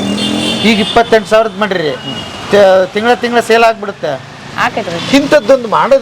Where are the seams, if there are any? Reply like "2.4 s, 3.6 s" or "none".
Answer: 4.9 s